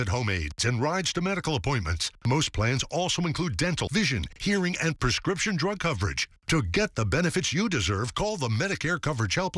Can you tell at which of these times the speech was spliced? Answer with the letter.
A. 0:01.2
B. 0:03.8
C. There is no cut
B